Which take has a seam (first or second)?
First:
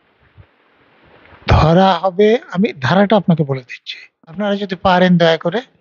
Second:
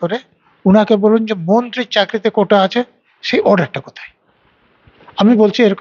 first